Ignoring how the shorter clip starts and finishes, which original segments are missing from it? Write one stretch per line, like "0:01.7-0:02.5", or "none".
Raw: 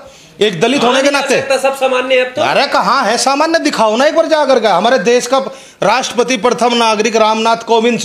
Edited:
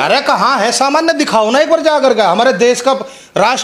none